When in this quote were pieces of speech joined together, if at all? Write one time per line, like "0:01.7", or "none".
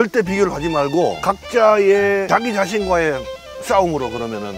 0:01.2
0:02.3